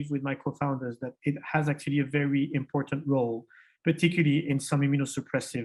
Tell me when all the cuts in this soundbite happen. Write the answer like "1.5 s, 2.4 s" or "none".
none